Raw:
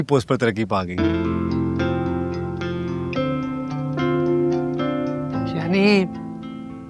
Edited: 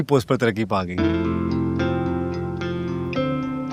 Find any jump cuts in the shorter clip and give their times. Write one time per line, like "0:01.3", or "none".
none